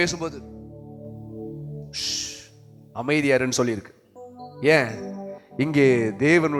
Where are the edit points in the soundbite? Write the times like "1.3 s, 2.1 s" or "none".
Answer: none